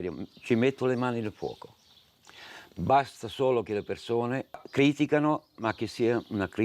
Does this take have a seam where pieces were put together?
yes; 1 cut; at 4.6 s

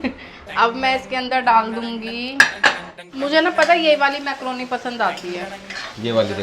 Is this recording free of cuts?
no; 1 cut; at 2.9 s

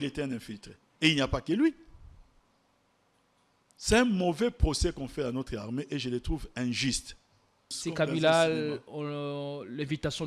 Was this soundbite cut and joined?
yes; 1 cut; at 7.7 s

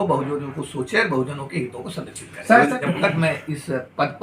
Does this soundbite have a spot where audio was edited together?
yes; 1 cut; at 2.8 s

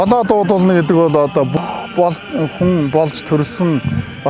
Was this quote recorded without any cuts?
no; 1 cut; at 1.6 s

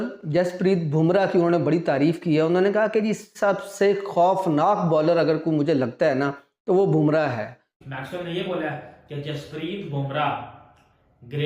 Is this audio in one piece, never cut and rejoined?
no; 1 cut; at 7.6 s

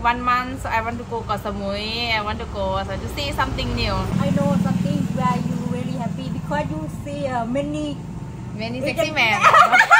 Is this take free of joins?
no; 1 cut; at 4.1 s

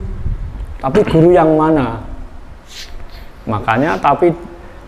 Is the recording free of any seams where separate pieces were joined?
yes; 0 cuts

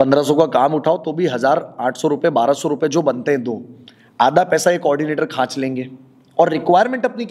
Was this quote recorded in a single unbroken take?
yes; 0 cuts

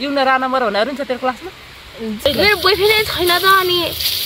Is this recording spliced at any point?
yes; 1 cut; at 2.3 s

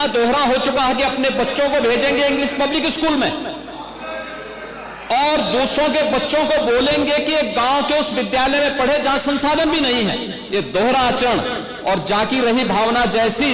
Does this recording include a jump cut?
no; 0 cuts

